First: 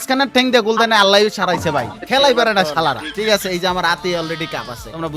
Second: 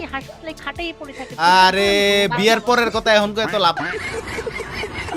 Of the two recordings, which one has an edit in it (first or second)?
first